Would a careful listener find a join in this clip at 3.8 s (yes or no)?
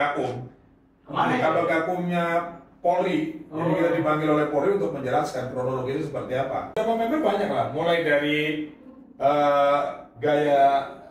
no